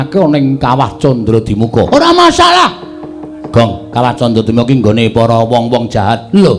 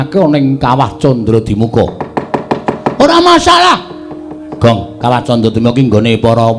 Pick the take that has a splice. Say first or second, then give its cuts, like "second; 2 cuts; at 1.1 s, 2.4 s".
first; 1 cut; at 1.9 s